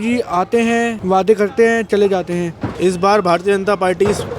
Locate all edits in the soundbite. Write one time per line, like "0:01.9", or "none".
0:01.0
0:02.7